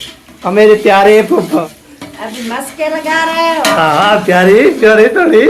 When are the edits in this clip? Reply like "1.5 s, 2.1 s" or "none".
1.6 s